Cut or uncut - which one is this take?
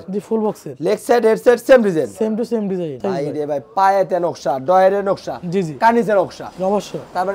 cut